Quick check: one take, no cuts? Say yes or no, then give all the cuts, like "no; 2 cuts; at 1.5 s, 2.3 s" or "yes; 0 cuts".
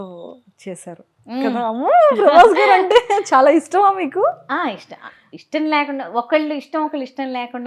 yes; 0 cuts